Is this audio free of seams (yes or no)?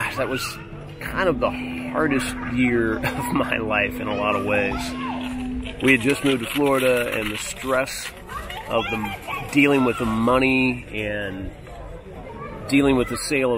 yes